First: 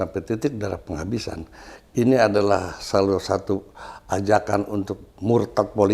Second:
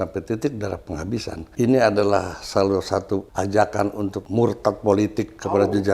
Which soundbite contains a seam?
second; 3 cuts; at 1.4 s, 3.3 s, 4.2 s

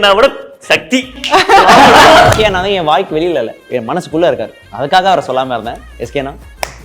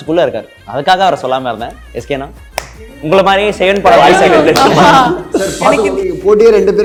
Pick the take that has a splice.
first; 1 cut; at 2.3 s

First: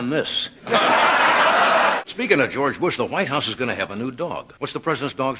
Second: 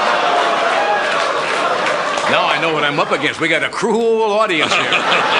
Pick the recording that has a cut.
first; 2 cuts; at 2.0 s, 4.5 s

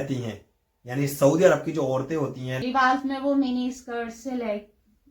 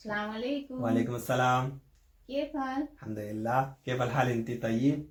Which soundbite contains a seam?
first; 1 cut; at 2.5 s

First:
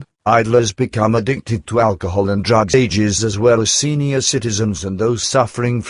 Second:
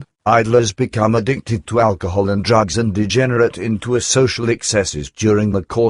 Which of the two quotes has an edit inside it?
second; 1 cut; at 2.7 s

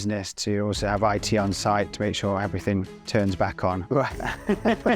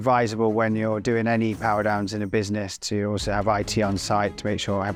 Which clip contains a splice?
first; 1 cut; at 3.8 s

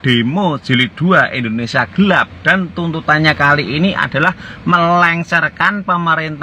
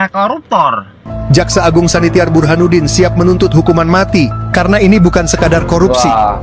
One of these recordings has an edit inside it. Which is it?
second; 1 cut; at 1.1 s

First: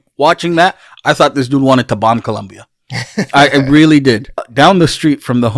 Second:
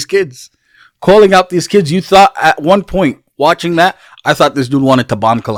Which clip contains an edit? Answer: first; 1 cut; at 4.5 s

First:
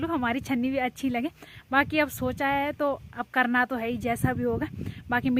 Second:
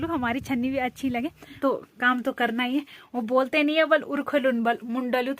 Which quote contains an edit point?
second; 1 cut; at 1.6 s

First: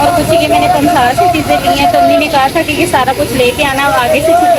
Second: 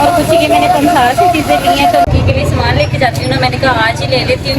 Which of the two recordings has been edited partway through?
second; 1 cut; at 2.0 s

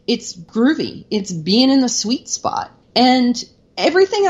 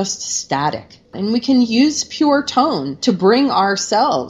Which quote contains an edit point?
second; 1 cut; at 1.1 s

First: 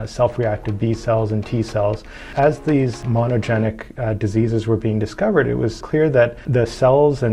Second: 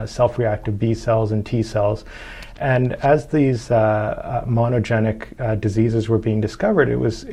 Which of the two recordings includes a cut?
first; 3 cuts; at 2.3 s, 3.0 s, 5.9 s

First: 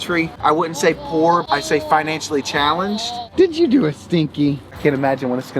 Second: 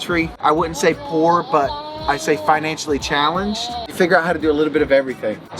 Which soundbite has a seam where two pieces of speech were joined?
first; 3 cuts; at 1.4 s, 3.2 s, 4.7 s

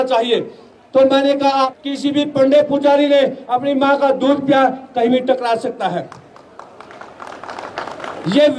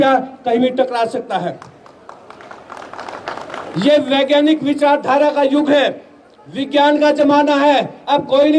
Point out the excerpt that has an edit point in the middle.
first; 1 cut; at 1.7 s

